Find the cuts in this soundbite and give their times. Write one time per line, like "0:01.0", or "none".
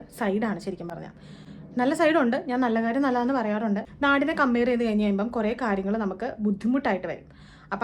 0:03.9